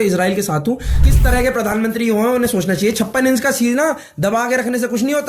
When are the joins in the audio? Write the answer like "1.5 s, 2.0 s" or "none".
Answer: 0.9 s